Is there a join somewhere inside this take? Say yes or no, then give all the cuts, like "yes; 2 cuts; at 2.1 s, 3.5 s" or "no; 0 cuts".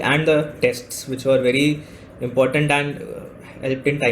no; 0 cuts